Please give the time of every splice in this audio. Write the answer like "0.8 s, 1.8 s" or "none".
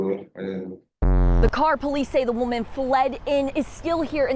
1.3 s